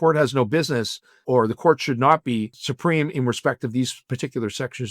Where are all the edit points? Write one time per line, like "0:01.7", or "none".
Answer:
0:01.2
0:02.6